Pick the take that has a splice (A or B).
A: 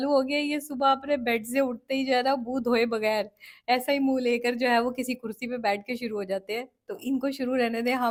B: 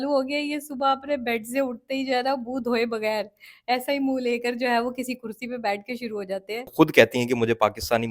B